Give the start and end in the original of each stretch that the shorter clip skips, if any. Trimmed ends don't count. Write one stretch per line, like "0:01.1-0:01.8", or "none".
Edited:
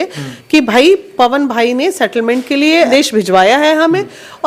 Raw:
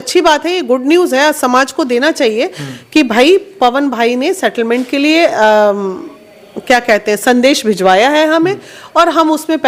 0:05.3-0:07.4

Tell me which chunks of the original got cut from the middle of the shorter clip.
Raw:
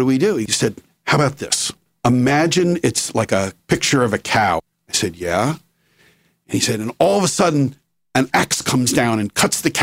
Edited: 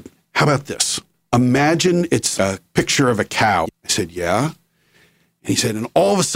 0:03.1-0:03.3
0:04.8-0:04.9

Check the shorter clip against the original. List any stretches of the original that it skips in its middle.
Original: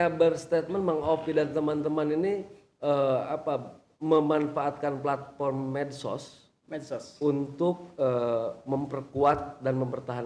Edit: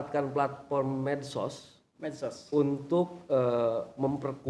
none

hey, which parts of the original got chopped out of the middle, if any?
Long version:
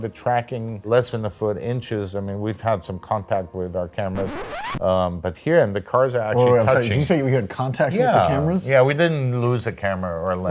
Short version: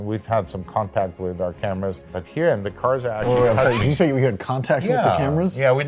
0:04.4-0:05.2

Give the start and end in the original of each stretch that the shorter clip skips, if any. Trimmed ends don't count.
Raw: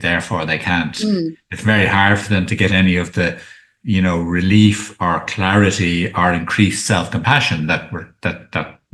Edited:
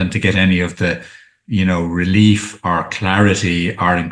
none

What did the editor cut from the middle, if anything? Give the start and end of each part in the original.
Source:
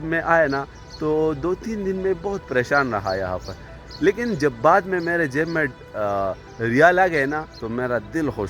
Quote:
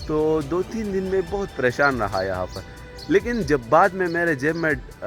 none

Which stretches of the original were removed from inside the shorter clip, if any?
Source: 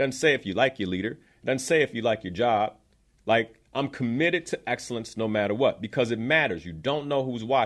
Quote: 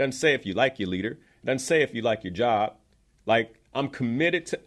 none

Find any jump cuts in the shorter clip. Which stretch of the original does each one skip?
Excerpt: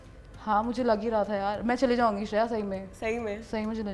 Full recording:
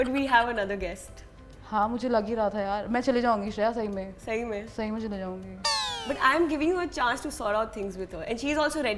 none

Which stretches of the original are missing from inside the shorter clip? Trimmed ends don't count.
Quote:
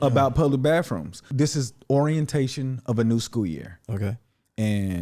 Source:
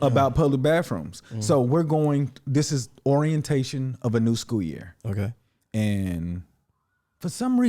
0:01.2-0:02.4

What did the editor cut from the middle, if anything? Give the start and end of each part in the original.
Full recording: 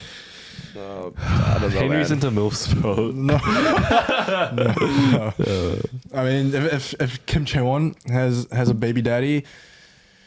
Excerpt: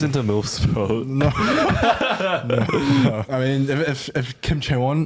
0:05.3-0:06.1

